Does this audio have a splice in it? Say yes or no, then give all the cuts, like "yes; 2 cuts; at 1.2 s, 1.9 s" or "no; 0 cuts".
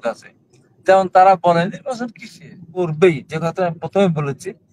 yes; 1 cut; at 2.8 s